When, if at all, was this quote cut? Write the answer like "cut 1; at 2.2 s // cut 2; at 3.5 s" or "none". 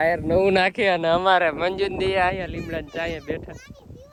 none